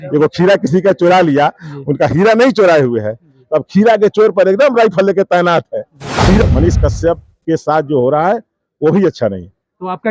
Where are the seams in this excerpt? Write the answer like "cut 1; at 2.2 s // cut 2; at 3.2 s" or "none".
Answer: cut 1; at 6.4 s